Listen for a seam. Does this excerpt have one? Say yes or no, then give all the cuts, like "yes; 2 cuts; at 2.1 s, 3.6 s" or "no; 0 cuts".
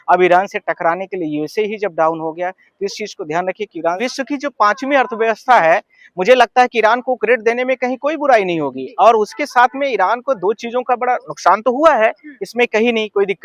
yes; 1 cut; at 4.0 s